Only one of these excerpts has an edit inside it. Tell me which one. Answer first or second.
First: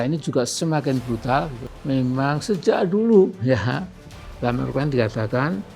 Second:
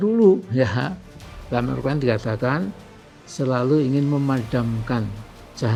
first